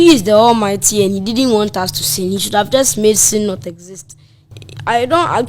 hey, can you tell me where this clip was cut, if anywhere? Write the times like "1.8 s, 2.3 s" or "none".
4.6 s